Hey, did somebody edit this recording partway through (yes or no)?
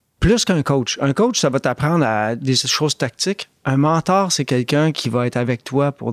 no